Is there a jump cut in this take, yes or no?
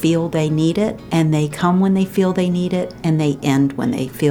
yes